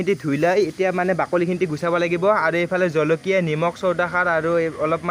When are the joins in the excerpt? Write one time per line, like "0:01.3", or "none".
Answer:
none